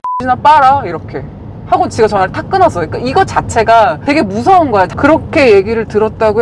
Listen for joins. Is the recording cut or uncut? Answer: cut